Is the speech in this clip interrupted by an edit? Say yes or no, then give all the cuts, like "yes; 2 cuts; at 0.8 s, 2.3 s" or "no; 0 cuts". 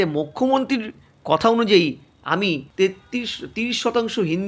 yes; 1 cut; at 2.7 s